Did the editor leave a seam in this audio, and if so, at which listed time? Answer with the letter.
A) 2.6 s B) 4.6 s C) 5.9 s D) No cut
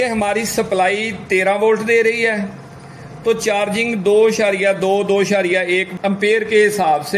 C